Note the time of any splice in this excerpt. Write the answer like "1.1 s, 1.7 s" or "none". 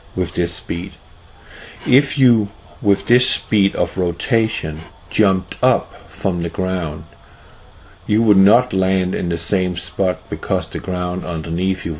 6.0 s